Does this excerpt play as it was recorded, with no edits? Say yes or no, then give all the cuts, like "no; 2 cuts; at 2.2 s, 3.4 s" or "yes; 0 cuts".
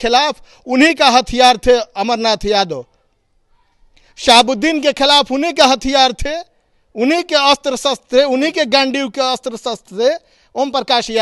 yes; 0 cuts